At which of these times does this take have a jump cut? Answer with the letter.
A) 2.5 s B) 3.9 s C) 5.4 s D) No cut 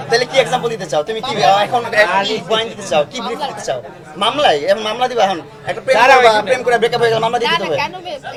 D